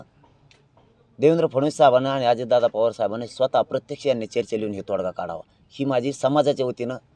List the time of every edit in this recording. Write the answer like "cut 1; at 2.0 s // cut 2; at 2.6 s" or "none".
none